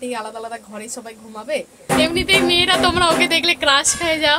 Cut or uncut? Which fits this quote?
cut